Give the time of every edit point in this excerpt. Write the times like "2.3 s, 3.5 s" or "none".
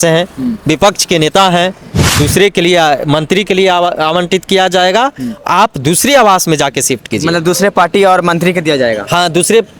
2.2 s